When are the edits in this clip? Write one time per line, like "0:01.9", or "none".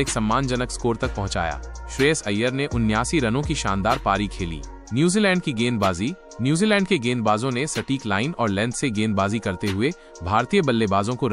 none